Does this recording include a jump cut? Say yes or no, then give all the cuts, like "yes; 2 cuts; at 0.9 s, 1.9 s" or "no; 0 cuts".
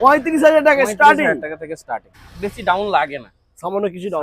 yes; 1 cut; at 2.0 s